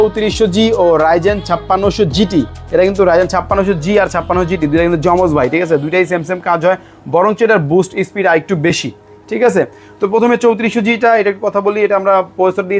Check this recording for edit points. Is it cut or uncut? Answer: uncut